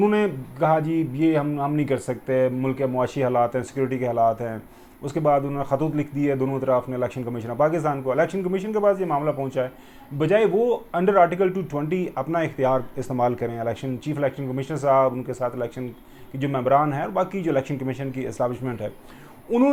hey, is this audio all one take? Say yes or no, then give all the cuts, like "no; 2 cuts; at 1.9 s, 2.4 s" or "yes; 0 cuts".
yes; 0 cuts